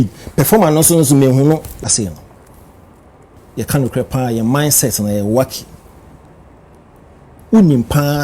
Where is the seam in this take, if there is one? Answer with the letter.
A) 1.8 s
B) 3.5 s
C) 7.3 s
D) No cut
A